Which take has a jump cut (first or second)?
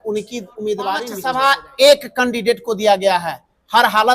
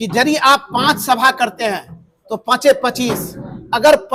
first